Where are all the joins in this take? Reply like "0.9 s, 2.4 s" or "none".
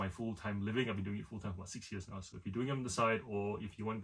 none